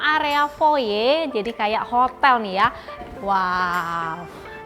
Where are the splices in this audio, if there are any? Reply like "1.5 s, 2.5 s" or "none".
3.0 s

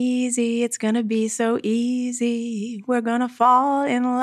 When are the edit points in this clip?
none

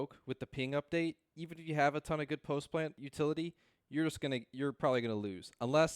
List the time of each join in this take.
3.0 s

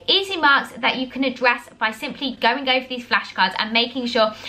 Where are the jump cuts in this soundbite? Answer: none

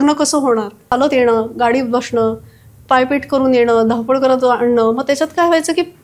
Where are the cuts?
0.9 s

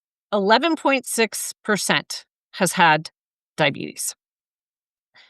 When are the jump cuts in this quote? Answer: none

